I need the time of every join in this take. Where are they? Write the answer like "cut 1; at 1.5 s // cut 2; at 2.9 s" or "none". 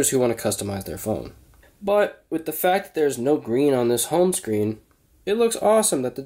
cut 1; at 1.5 s

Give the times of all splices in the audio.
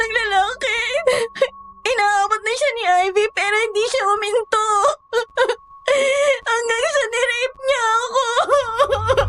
none

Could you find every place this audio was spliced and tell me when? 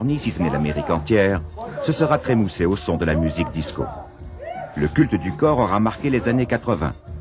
cut 1; at 4.0 s

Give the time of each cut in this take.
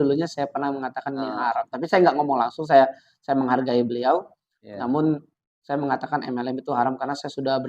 none

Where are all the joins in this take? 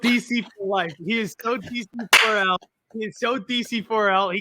none

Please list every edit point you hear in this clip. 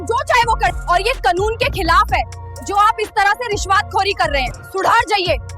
cut 1; at 4.6 s

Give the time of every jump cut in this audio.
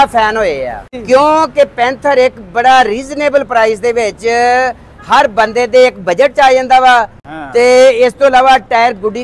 cut 1; at 1.0 s

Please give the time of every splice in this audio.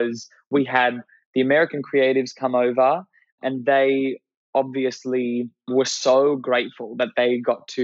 cut 1; at 3.4 s // cut 2; at 5.7 s

